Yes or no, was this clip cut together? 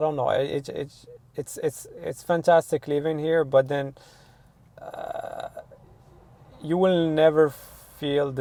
no